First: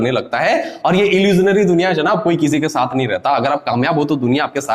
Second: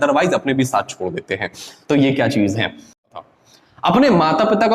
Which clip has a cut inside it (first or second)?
second